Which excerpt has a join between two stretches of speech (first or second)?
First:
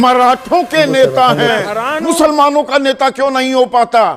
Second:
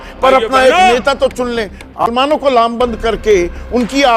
second